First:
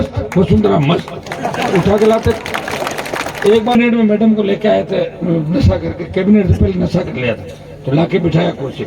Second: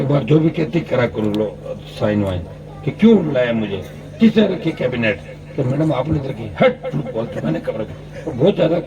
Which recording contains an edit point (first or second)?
first